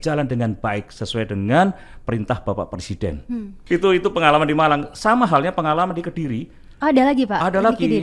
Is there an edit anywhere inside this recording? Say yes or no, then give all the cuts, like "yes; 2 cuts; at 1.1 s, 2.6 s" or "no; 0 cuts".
no; 0 cuts